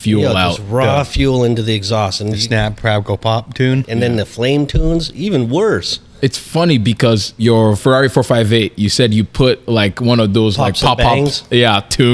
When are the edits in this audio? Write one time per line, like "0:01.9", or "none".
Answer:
0:03.8
0:07.7